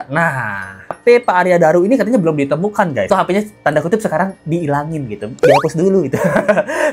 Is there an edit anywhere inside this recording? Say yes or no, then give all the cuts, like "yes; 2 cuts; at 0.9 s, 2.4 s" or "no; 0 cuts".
yes; 2 cuts; at 1.0 s, 3.1 s